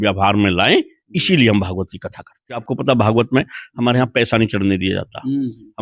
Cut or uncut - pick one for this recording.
cut